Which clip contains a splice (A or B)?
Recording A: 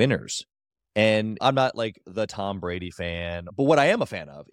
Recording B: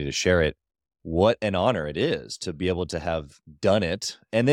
A